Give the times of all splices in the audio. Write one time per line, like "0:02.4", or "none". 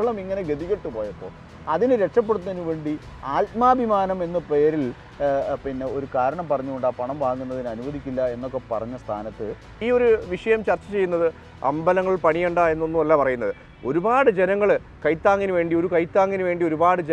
0:09.6

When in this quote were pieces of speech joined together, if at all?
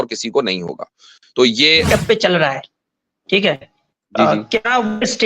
0:01.9

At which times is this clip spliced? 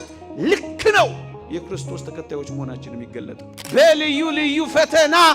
0:03.5

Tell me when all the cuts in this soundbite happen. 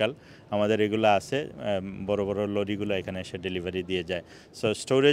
none

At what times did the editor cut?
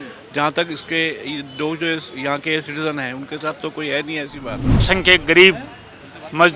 0:04.8

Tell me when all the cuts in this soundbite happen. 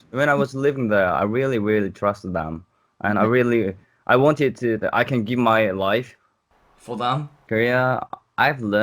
0:07.4

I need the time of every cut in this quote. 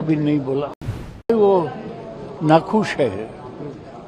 0:01.3

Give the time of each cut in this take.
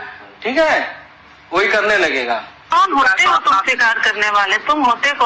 0:02.7

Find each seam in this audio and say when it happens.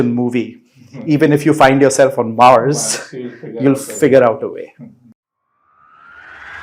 0:05.0

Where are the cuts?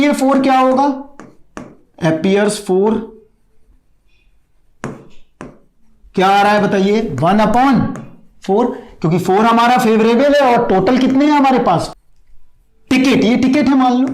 0:11.9

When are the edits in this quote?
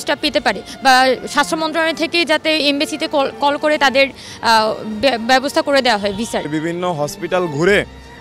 0:06.4

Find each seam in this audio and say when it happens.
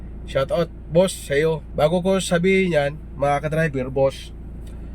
0:01.7

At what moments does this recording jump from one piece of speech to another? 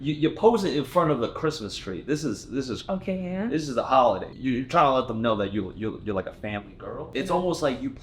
0:04.3
0:07.1

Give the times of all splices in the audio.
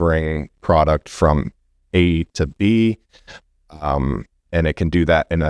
none

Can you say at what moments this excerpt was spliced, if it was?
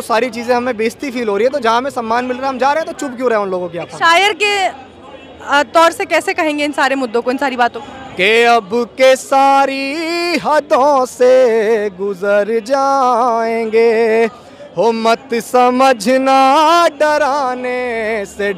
0:07.8

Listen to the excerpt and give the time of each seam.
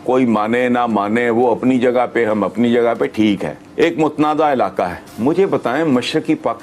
0:03.6

